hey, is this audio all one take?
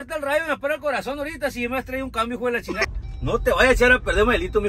no; 1 cut; at 2.8 s

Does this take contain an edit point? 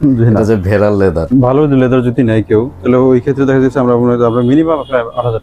yes; 1 cut; at 1.2 s

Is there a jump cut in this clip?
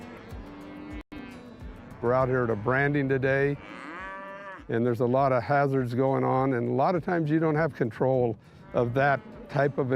yes; 1 cut; at 1.1 s

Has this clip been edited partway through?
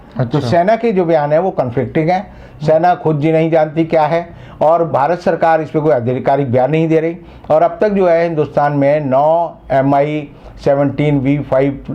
no; 0 cuts

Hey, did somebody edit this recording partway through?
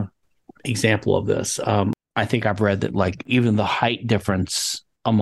yes; 2 cuts; at 2.0 s, 3.2 s

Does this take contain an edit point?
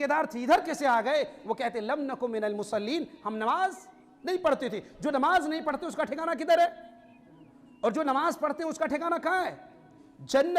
no; 0 cuts

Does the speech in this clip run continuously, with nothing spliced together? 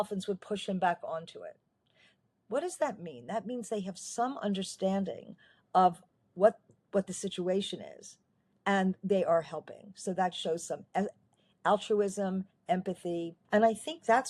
no; 1 cut; at 13.4 s

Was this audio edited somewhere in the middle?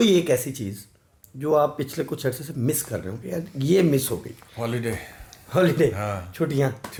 no; 0 cuts

